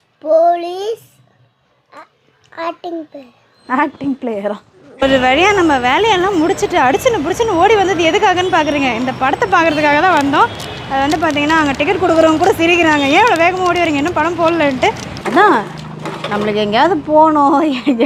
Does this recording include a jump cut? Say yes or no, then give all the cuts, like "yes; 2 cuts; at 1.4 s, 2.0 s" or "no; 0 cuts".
yes; 2 cuts; at 5.0 s, 15.1 s